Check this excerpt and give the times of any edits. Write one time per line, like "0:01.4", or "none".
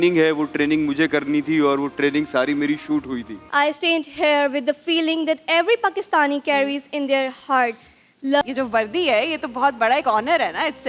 0:03.4
0:08.4